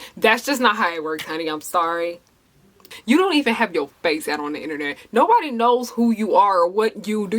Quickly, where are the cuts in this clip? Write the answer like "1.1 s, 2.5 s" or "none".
2.8 s